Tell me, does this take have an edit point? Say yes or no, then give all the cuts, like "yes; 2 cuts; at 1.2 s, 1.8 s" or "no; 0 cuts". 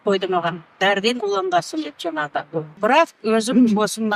yes; 1 cut; at 2.8 s